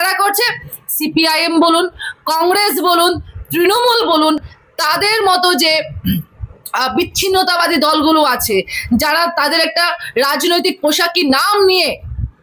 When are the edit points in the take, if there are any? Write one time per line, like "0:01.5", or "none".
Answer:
none